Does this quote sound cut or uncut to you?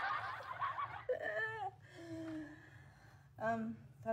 cut